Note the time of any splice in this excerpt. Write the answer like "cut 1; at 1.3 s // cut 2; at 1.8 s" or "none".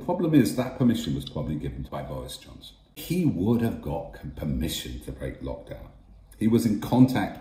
cut 1; at 1.9 s // cut 2; at 3.0 s